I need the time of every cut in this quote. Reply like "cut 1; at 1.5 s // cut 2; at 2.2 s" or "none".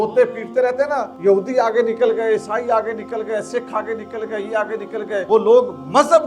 cut 1; at 1.1 s // cut 2; at 5.2 s